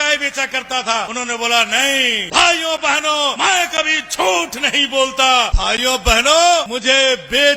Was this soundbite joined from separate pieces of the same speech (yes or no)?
yes